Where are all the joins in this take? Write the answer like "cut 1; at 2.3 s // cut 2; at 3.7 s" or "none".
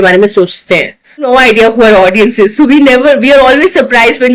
cut 1; at 1.3 s